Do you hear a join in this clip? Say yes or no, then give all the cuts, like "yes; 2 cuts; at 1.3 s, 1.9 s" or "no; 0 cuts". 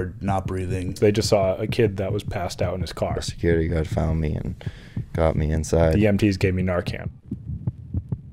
yes; 1 cut; at 7.0 s